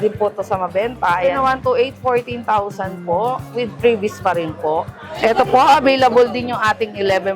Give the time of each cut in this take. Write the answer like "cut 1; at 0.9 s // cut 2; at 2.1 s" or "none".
cut 1; at 1.3 s // cut 2; at 5.0 s